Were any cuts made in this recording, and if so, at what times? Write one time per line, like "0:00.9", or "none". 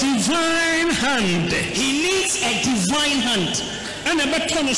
none